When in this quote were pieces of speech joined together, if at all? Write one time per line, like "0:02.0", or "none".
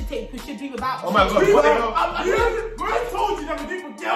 none

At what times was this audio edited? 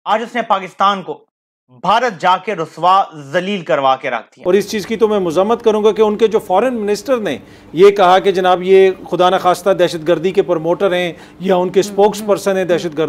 0:04.3

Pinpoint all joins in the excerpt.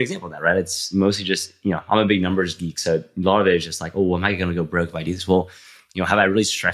none

